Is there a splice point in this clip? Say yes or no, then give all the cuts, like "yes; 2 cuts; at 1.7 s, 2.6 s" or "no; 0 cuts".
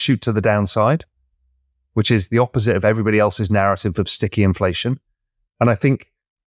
no; 0 cuts